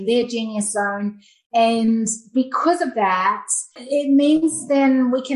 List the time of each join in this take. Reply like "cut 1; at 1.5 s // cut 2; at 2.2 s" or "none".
cut 1; at 3.7 s